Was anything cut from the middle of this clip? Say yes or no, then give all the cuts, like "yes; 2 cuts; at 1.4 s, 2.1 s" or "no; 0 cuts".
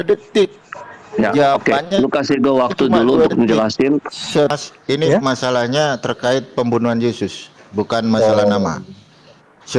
yes; 1 cut; at 4.5 s